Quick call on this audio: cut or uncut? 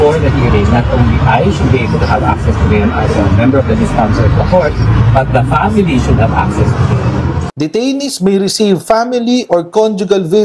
cut